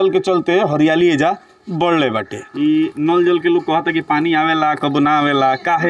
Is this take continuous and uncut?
no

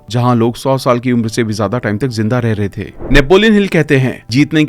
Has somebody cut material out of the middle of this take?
yes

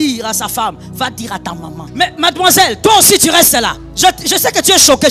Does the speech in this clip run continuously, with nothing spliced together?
no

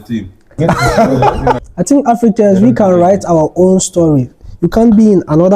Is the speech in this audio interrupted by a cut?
yes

